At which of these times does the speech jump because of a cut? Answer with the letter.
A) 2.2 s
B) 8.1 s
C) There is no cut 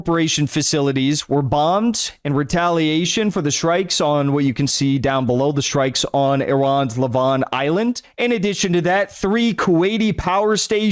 B